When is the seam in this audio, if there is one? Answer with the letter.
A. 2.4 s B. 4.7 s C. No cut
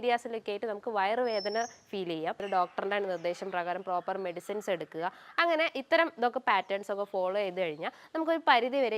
A